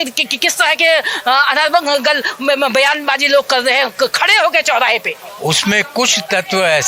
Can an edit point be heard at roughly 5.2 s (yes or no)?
yes